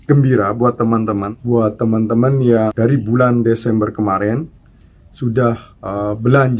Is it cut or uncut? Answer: cut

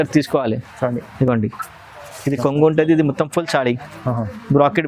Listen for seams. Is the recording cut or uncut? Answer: uncut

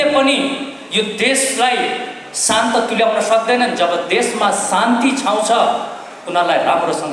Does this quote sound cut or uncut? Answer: uncut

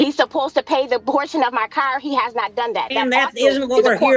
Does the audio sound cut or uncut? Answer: uncut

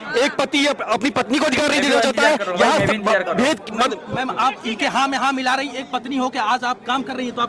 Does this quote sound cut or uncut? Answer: uncut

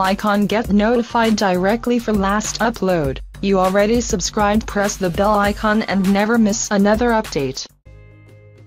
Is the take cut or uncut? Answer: uncut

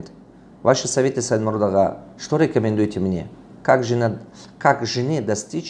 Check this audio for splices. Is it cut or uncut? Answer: uncut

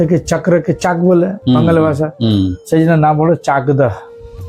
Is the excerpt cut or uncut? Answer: uncut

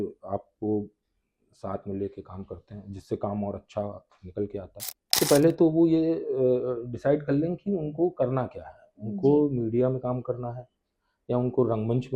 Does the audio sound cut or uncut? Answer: cut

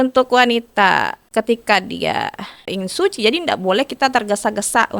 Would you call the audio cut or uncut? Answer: cut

